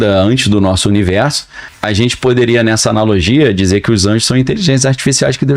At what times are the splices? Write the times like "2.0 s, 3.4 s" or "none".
1.7 s